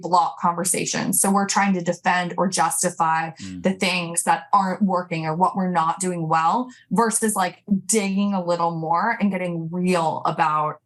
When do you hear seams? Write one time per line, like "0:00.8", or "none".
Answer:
none

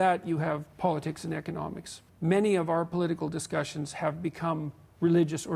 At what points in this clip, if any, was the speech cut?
0:02.0

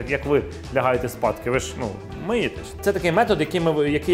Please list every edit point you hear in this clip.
0:02.8

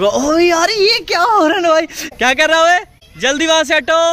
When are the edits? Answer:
0:02.0
0:03.0

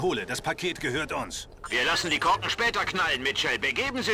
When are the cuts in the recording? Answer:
none

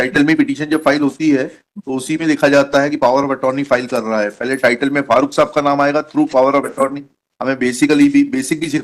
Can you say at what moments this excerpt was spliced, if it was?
none

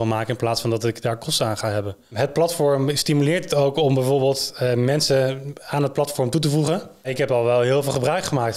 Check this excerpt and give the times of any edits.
0:02.1
0:07.1

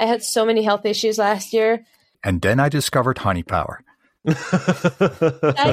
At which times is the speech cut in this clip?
0:02.2

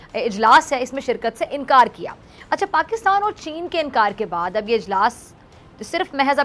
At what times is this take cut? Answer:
none

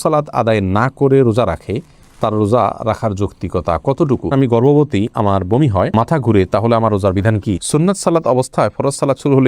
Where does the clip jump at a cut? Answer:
0:04.3
0:07.6

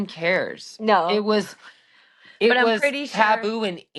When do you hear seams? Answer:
none

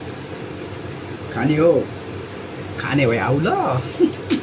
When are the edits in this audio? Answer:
none

